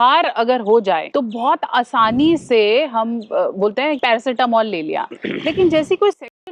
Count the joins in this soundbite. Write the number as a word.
two